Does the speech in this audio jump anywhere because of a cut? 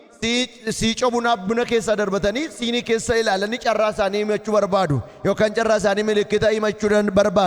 no; 0 cuts

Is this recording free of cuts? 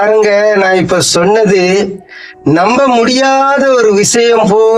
yes; 0 cuts

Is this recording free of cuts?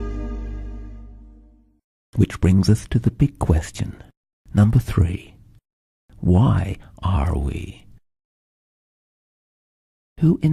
yes; 0 cuts

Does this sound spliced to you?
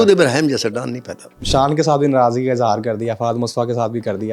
yes; 1 cut; at 1.4 s

